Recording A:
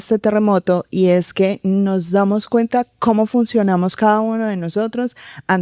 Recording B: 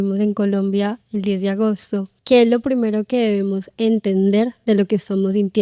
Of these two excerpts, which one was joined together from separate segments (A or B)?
B